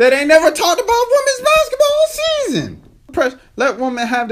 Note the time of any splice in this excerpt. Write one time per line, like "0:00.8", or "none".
0:03.1